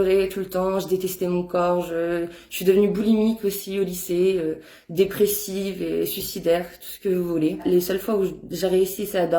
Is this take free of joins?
no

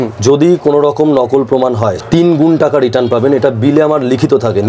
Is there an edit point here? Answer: yes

